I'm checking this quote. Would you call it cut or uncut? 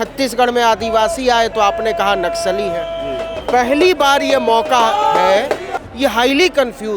cut